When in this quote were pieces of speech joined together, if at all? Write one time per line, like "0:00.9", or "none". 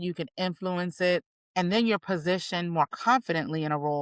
0:01.4